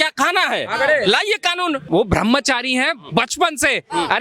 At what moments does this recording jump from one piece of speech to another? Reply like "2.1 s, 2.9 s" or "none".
1.8 s